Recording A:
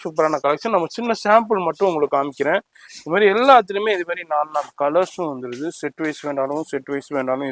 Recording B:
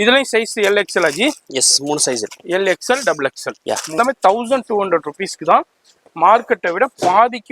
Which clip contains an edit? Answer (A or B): B